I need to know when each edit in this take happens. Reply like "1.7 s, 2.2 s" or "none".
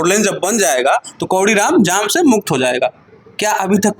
none